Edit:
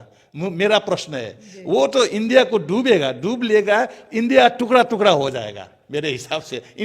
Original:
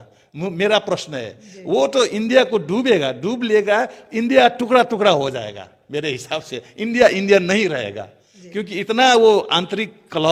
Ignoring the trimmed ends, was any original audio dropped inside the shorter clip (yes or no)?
no